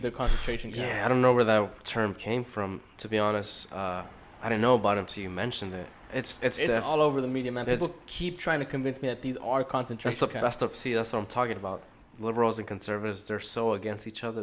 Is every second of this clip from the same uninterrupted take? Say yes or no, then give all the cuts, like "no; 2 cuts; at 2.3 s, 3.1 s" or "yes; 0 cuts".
yes; 0 cuts